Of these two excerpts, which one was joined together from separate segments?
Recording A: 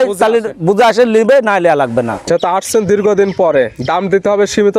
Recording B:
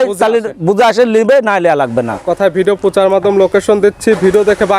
A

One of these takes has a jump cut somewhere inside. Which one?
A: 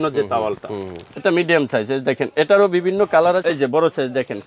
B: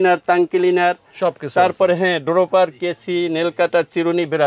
A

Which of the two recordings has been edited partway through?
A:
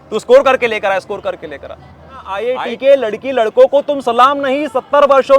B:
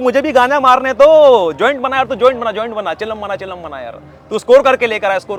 A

